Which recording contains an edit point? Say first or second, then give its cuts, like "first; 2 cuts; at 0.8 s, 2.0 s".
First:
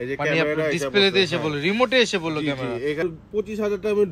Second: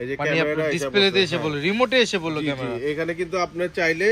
first; 1 cut; at 3.0 s